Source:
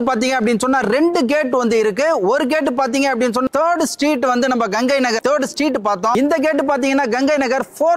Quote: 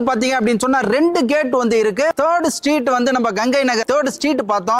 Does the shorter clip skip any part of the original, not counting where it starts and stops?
yes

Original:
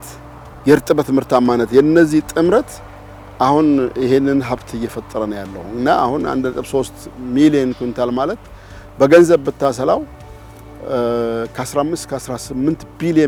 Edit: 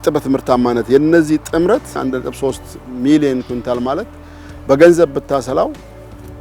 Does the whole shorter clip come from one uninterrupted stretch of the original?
no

